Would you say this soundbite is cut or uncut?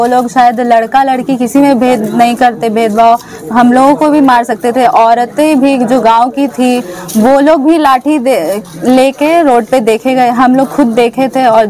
uncut